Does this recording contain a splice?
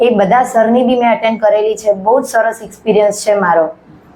no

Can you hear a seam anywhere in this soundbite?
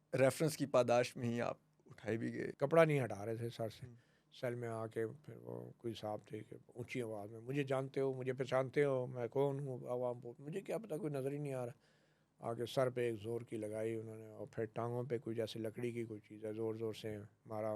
yes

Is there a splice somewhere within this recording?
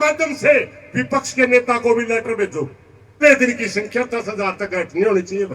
yes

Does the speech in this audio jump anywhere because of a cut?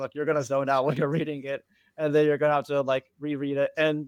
no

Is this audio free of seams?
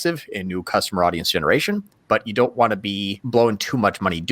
no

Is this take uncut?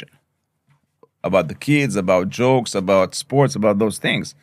yes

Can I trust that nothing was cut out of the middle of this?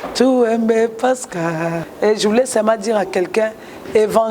no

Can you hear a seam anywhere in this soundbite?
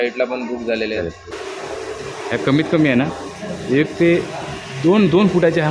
yes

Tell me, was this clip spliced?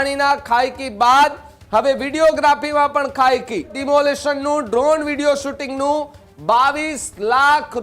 yes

